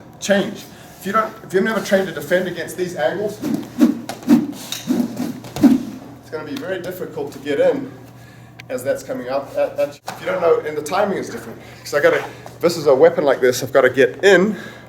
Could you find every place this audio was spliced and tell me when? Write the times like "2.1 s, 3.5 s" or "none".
10.1 s

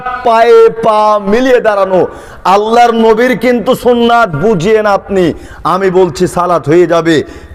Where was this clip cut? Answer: none

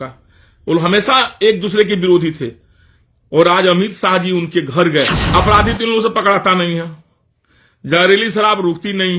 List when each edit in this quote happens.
5.2 s

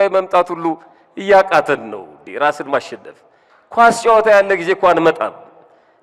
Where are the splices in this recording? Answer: none

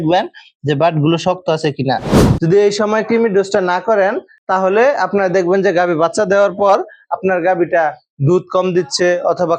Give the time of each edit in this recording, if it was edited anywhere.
2.2 s

